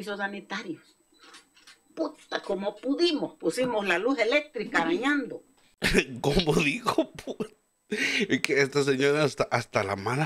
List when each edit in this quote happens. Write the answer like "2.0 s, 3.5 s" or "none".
none